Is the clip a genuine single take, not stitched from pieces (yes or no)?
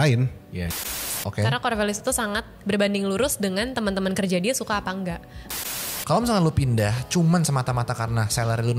no